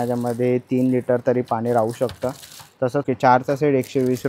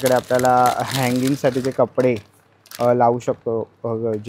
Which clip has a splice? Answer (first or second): first